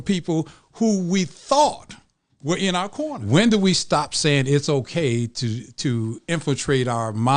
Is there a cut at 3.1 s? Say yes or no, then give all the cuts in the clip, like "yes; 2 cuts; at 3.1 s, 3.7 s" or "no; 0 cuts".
yes; 1 cut; at 3.1 s